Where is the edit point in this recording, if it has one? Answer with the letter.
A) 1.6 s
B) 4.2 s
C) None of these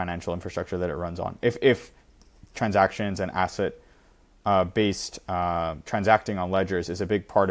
C